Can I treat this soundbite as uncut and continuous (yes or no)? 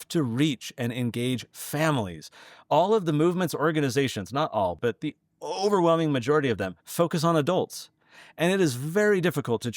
no